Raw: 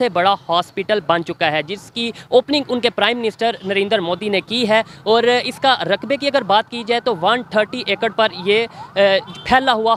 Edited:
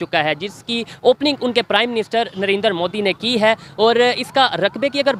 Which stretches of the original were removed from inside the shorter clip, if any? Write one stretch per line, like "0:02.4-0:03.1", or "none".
none